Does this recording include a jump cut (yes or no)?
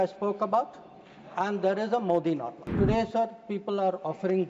yes